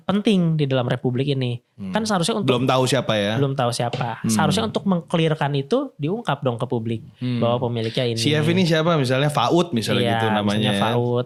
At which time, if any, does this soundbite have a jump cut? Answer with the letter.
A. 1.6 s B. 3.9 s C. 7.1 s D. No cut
D